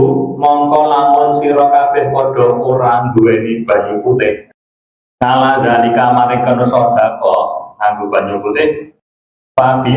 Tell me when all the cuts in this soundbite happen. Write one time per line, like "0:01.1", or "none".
none